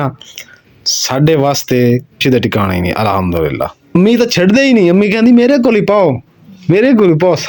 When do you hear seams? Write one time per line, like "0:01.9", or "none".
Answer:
0:02.2
0:03.8